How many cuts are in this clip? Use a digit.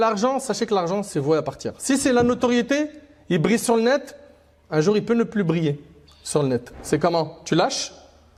0